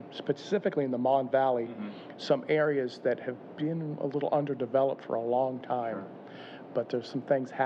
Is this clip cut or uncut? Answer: uncut